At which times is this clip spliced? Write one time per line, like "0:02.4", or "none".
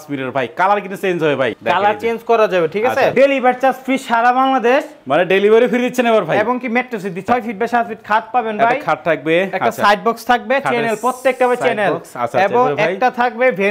0:01.6
0:03.1
0:07.2